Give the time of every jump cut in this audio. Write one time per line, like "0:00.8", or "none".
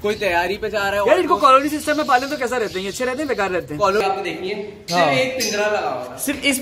0:04.0